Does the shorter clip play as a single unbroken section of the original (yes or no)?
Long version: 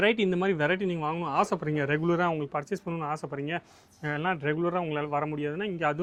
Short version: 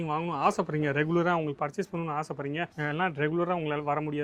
no